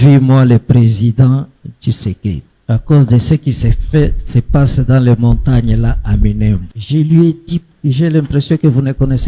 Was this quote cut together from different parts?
yes; 3 cuts; at 2.5 s, 6.7 s, 7.7 s

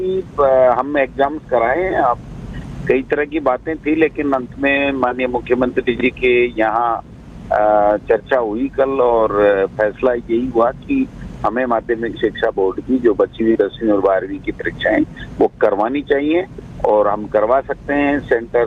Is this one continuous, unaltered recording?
yes; 0 cuts

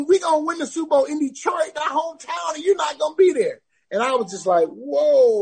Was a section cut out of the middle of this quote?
no; 0 cuts

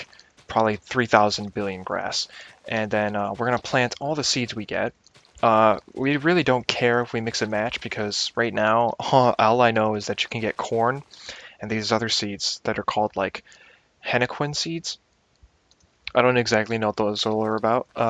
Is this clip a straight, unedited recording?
no; 1 cut; at 1.8 s

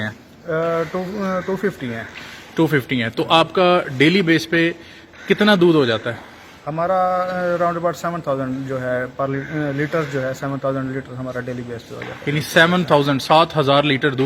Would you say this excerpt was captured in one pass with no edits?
yes; 0 cuts

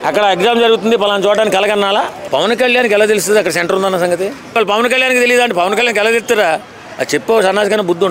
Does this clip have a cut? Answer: yes; 2 cuts; at 2.2 s, 4.6 s

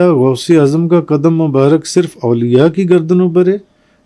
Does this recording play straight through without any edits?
yes; 0 cuts

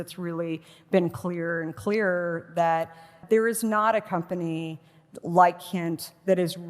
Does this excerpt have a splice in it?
yes; 1 cut; at 3.1 s

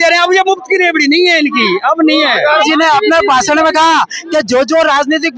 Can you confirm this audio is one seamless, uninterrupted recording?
no; 1 cut; at 2.7 s

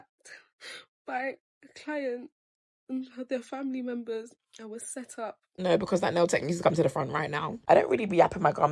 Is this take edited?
yes; 1 cut; at 5.4 s

